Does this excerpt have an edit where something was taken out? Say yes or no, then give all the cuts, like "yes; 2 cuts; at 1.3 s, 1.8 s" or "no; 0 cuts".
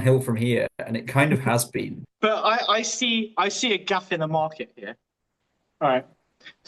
yes; 1 cut; at 2.0 s